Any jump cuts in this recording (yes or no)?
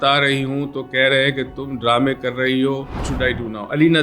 yes